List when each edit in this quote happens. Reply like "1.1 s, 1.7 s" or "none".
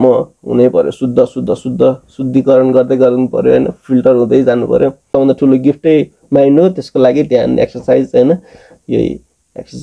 5.1 s